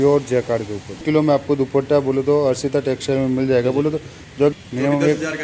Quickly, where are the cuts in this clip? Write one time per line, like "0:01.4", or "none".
0:01.0
0:04.5